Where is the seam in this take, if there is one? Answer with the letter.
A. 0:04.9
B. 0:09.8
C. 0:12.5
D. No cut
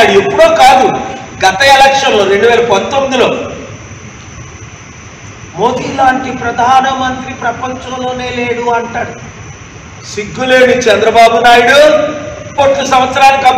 C